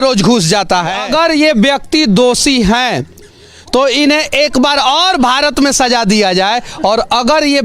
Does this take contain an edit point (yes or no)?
yes